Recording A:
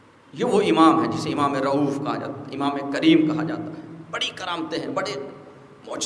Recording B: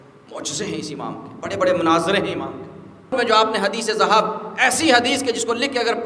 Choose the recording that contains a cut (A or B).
B